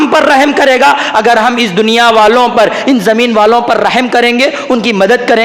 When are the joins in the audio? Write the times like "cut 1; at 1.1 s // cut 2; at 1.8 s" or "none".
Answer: none